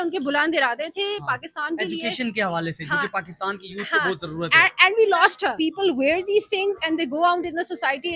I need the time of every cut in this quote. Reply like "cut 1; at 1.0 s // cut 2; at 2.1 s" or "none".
cut 1; at 5.5 s